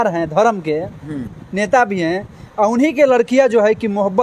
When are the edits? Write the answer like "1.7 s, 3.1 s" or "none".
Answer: none